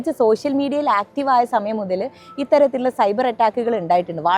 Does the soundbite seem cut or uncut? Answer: uncut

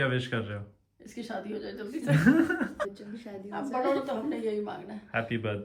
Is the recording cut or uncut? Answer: uncut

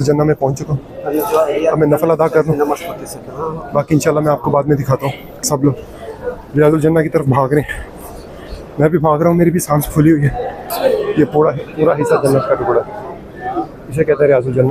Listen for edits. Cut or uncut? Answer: cut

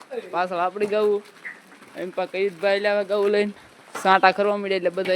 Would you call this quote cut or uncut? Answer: uncut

